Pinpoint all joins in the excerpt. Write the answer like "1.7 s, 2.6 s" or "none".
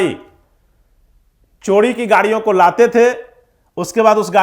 none